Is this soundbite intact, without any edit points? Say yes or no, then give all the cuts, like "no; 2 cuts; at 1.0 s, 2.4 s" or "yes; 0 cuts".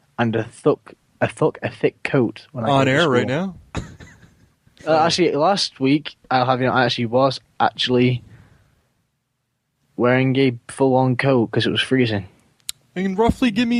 no; 1 cut; at 1.7 s